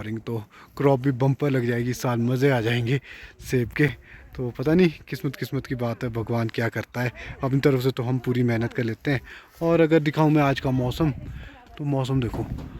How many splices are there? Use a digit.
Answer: 0